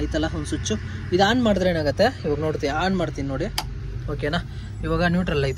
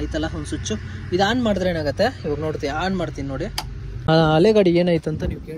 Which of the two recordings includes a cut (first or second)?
second